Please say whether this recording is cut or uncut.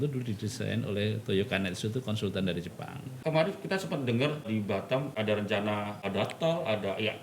cut